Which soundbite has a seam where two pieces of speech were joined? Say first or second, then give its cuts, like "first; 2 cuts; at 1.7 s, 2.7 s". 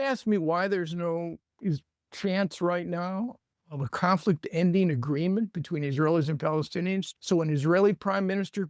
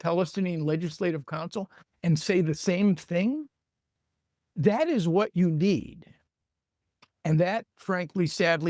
first; 1 cut; at 7.1 s